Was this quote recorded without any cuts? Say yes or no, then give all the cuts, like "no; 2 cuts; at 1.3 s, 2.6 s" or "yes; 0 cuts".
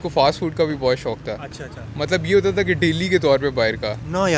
yes; 0 cuts